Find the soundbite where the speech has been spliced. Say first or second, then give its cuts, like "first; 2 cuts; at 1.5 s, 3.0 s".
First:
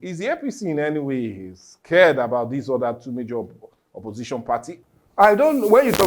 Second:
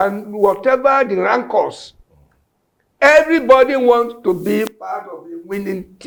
first; 1 cut; at 4.7 s